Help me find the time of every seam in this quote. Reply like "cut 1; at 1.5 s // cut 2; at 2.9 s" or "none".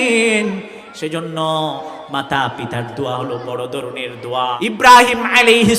cut 1; at 4.5 s